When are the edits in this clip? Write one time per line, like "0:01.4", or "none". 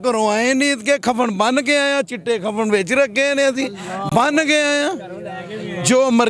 none